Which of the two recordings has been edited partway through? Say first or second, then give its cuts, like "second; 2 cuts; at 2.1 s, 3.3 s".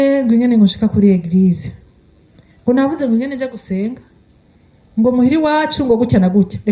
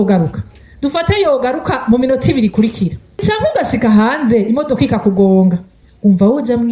second; 2 cuts; at 3.2 s, 5.8 s